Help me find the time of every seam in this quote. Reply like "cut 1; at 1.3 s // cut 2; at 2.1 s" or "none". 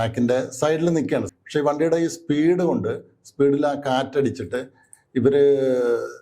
cut 1; at 1.3 s

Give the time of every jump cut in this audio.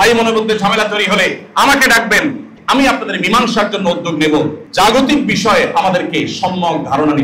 cut 1; at 2.5 s // cut 2; at 4.6 s

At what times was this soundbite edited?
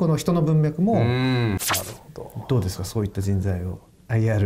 cut 1; at 1.6 s

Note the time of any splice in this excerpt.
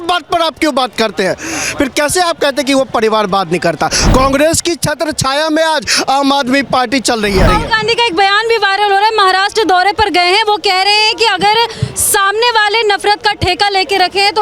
cut 1; at 4.0 s // cut 2; at 7.5 s

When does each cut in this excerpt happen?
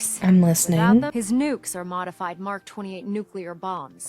cut 1; at 1.1 s

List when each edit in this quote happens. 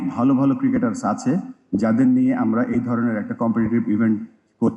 none

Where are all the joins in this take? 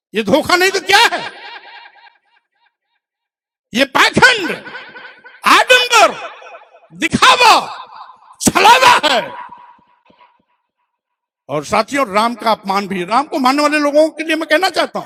none

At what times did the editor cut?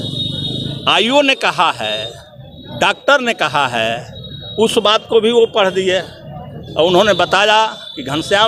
none

